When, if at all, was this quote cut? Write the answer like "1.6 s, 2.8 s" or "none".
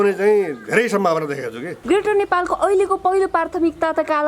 1.7 s